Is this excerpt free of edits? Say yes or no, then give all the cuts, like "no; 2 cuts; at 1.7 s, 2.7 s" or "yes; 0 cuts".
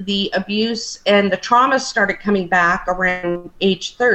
yes; 0 cuts